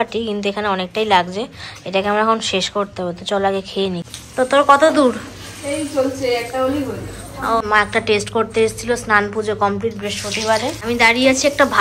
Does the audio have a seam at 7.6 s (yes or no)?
yes